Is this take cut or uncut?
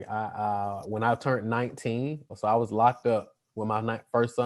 cut